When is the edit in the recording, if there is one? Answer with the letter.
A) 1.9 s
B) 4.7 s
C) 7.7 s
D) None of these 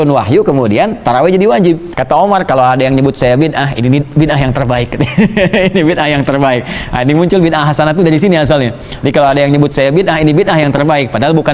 A